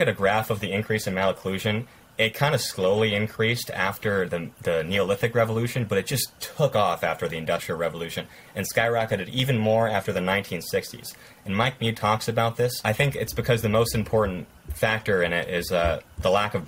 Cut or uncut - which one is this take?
cut